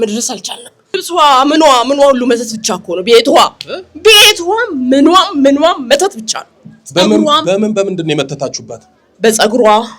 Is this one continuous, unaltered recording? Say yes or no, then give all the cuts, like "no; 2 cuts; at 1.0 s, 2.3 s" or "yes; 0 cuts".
no; 1 cut; at 1.0 s